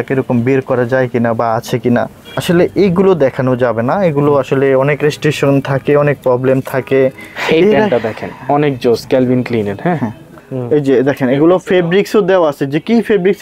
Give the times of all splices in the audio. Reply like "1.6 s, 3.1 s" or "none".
2.3 s, 7.3 s, 10.3 s